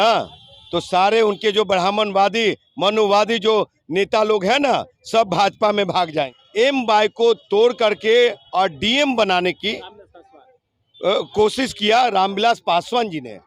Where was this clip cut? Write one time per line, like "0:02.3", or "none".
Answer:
0:06.4